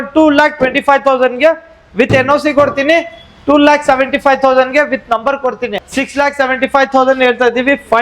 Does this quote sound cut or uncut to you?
cut